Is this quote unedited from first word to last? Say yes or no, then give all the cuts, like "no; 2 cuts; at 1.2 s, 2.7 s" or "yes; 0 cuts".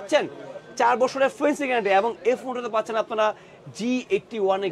yes; 0 cuts